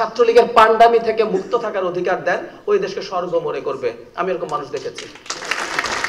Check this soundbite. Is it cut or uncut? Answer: uncut